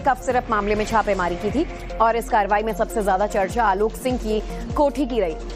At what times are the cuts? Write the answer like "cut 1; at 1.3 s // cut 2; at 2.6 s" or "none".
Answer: cut 1; at 1.0 s